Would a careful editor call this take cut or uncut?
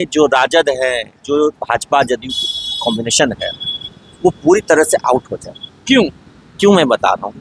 uncut